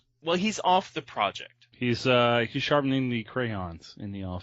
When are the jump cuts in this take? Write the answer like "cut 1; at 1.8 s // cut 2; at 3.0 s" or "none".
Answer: cut 1; at 1.1 s